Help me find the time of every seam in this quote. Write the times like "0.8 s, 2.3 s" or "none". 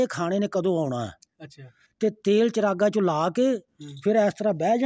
none